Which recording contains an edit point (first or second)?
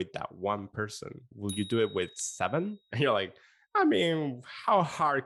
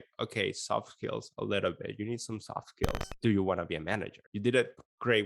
second